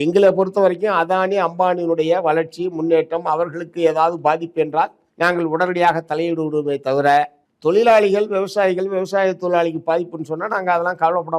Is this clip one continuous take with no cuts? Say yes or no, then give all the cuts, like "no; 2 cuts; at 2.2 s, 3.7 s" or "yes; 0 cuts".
no; 1 cut; at 5.0 s